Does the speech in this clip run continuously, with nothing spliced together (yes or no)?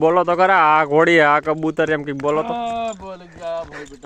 yes